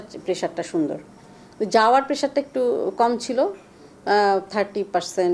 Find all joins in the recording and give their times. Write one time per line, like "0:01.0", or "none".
none